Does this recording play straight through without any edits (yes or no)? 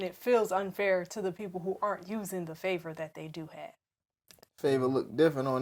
yes